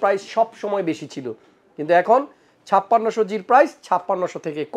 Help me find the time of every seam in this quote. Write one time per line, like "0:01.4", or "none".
none